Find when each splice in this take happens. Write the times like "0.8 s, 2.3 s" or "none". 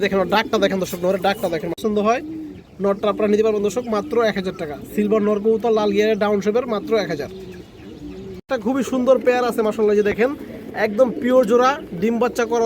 1.8 s, 8.7 s